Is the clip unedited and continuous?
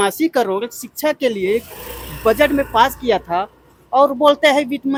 yes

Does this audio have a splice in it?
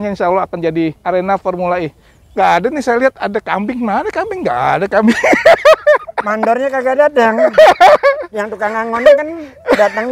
yes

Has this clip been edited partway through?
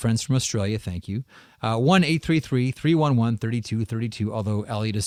no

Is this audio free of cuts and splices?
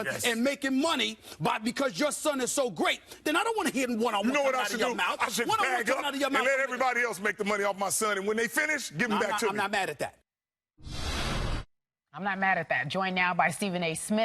no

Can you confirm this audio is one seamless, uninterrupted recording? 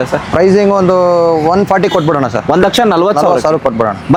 yes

